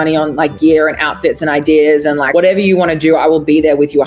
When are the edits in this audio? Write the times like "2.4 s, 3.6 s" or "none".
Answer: 2.2 s